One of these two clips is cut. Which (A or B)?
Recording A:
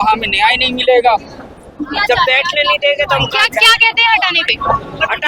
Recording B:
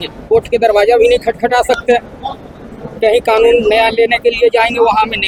A